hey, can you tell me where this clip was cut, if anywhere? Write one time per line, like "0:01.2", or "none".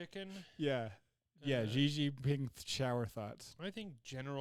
0:03.4

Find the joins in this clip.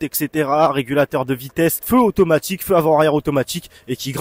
0:01.8

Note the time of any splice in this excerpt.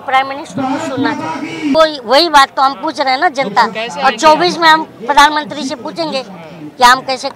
0:01.7

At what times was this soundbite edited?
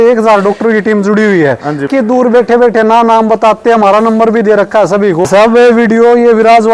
0:01.9
0:05.3

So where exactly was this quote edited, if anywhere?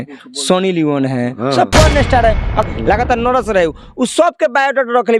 0:02.6

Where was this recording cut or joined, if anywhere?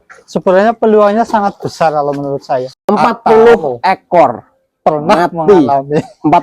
0:02.7

